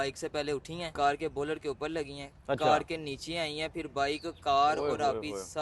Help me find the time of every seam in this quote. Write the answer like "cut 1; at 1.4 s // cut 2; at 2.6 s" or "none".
cut 1; at 0.9 s

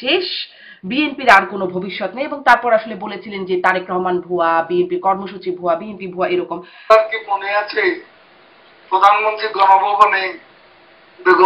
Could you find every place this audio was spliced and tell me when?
cut 1; at 6.9 s

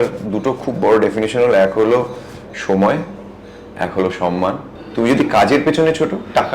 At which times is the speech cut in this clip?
cut 1; at 4.7 s

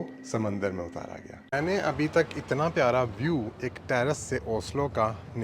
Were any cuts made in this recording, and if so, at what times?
cut 1; at 1.5 s

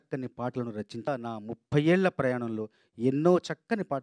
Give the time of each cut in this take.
cut 1; at 1.1 s

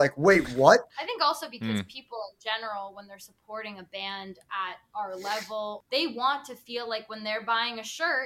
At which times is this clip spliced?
cut 1; at 0.9 s // cut 2; at 5.8 s

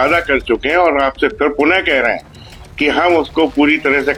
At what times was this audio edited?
none

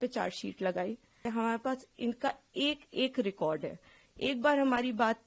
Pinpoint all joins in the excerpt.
cut 1; at 1.2 s

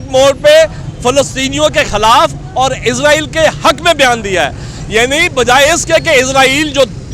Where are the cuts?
none

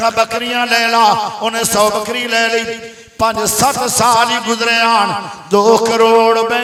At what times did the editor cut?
none

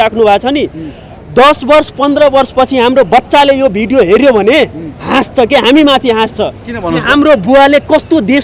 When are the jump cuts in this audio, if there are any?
none

